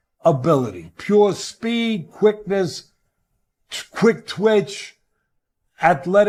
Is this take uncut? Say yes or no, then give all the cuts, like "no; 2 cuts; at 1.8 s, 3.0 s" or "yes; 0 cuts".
yes; 0 cuts